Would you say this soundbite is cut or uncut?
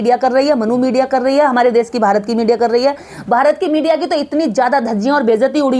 uncut